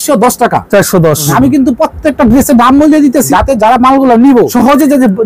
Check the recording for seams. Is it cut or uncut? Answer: cut